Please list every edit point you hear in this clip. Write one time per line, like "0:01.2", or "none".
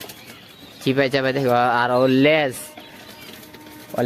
none